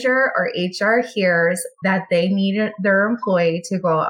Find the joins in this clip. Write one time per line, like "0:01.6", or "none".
0:01.7